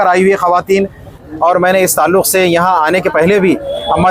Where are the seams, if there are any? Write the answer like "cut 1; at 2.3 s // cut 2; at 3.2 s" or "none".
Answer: cut 1; at 1.2 s